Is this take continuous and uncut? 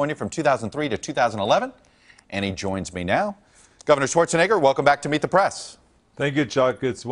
yes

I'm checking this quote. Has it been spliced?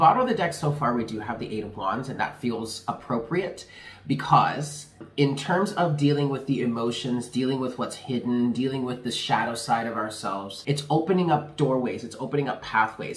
yes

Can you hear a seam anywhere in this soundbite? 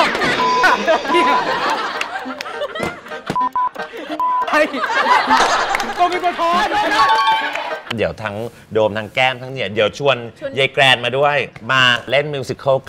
yes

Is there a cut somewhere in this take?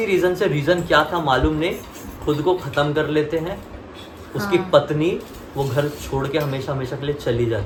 no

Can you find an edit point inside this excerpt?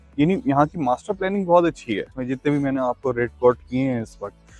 yes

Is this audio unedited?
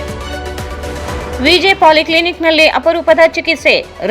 yes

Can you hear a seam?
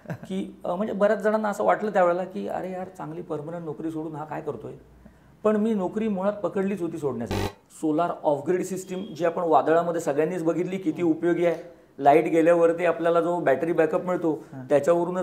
yes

